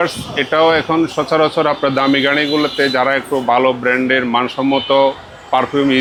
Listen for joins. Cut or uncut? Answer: uncut